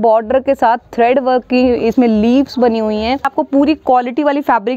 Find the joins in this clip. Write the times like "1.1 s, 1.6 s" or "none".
3.3 s